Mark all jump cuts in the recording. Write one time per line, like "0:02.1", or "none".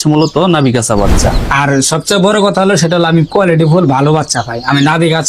0:01.4